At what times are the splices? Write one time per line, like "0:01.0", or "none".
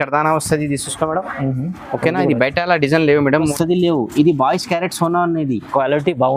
0:03.5